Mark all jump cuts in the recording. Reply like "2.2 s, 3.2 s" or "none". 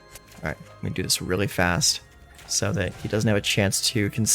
none